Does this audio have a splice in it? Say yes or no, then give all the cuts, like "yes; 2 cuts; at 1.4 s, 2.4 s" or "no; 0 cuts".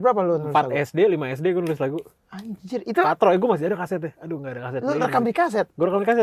no; 0 cuts